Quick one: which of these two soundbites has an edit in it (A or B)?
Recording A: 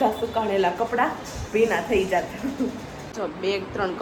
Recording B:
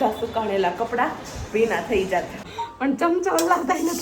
B